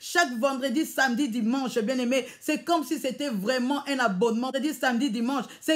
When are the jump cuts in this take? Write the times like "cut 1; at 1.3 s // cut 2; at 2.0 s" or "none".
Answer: cut 1; at 4.5 s